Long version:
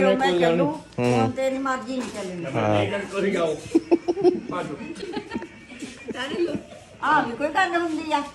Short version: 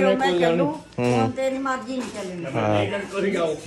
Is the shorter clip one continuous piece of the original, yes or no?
yes